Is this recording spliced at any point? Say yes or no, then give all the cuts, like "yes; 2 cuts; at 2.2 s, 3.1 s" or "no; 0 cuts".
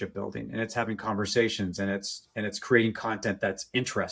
no; 0 cuts